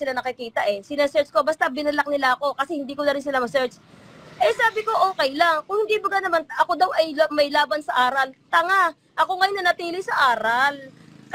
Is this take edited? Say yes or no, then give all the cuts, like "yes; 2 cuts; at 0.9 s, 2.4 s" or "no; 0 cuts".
no; 0 cuts